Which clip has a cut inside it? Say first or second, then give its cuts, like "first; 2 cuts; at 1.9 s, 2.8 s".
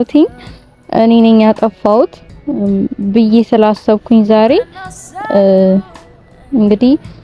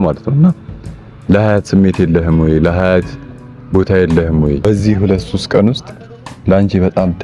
second; 1 cut; at 4.6 s